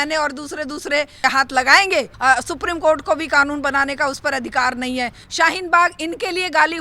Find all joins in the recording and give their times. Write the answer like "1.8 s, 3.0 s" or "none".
1.2 s, 2.1 s, 5.2 s